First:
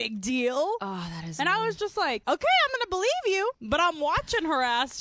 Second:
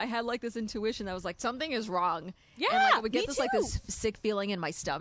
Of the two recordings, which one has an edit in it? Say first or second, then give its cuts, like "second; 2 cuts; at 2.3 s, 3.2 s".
first; 2 cuts; at 2.2 s, 3.6 s